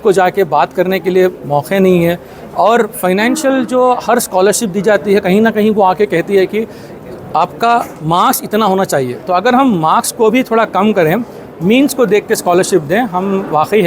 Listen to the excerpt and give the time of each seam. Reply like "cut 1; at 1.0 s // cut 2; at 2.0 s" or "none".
none